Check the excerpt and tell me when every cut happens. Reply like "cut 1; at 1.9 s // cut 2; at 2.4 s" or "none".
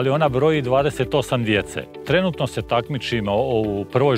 cut 1; at 2.0 s